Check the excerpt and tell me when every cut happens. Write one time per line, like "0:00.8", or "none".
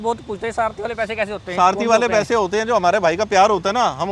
none